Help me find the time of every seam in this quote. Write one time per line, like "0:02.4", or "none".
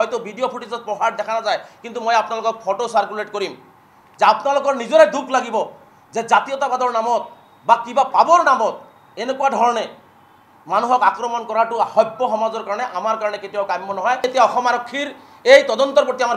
0:14.2

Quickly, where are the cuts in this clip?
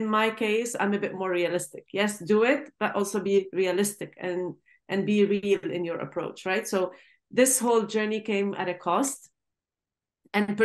none

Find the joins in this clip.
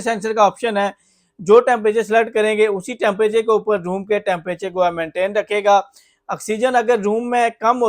none

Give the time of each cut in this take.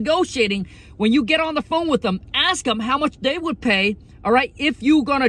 none

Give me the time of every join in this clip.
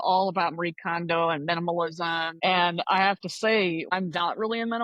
0:02.3
0:03.9

